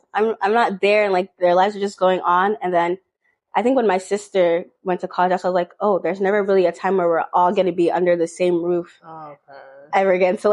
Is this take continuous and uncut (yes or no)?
yes